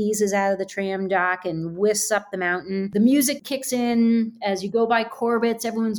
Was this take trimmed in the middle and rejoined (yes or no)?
yes